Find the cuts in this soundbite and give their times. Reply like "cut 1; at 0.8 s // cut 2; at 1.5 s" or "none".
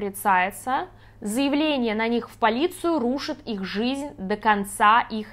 cut 1; at 1.0 s

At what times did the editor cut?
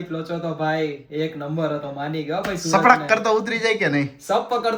none

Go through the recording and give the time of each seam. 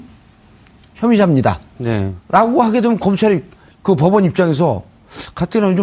none

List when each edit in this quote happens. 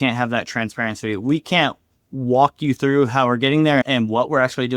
cut 1; at 3.8 s

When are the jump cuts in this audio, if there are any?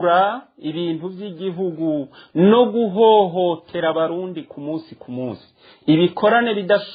none

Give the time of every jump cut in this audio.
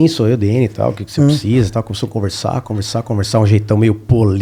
none

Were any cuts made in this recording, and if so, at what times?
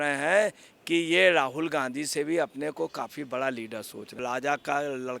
cut 1; at 4.2 s

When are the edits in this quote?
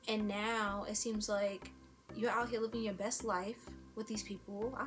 none

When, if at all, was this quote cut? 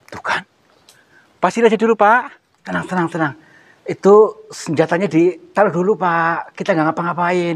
cut 1; at 2.7 s

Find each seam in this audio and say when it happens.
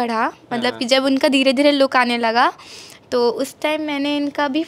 none

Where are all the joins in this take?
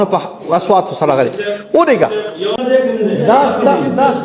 cut 1; at 2.6 s

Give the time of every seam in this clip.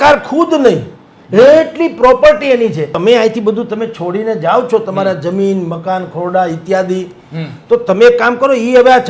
cut 1; at 2.9 s

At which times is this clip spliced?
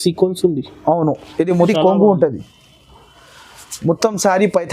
cut 1; at 1.6 s

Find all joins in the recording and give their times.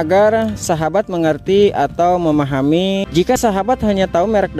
cut 1; at 3.3 s

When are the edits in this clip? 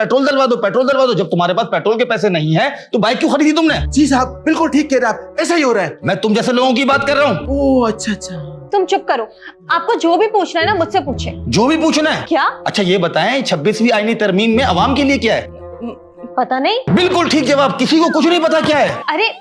none

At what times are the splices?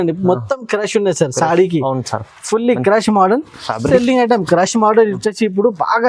cut 1; at 3.8 s

